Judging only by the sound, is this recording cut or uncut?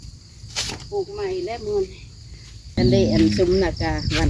cut